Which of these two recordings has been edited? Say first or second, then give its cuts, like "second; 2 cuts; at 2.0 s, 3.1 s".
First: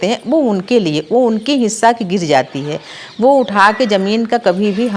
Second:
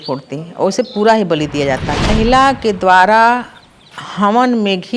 second; 1 cut; at 2.1 s